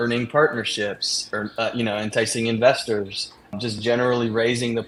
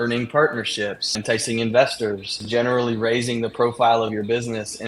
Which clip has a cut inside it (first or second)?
second